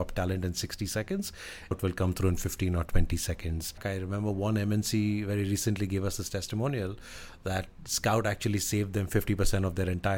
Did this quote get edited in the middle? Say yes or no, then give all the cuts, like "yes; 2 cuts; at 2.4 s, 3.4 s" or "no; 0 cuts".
yes; 2 cuts; at 1.7 s, 3.8 s